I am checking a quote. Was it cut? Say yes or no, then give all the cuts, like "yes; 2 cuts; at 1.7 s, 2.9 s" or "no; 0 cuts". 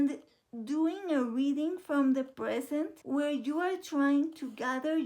no; 0 cuts